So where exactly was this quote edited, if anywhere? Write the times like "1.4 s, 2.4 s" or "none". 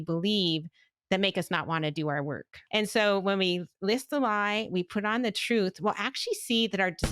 2.5 s